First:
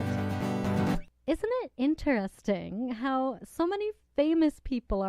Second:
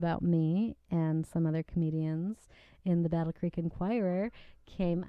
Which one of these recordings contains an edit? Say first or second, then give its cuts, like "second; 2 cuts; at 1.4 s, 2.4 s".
first; 1 cut; at 1.1 s